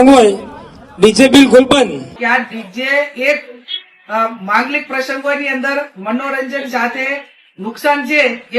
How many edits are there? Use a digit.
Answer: 1